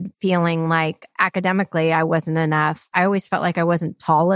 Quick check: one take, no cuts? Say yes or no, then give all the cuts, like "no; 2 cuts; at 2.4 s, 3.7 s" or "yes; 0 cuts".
no; 2 cuts; at 1.1 s, 2.9 s